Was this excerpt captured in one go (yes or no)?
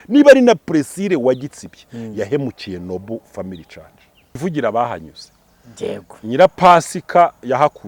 no